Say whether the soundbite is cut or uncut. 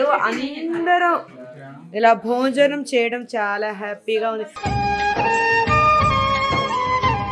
uncut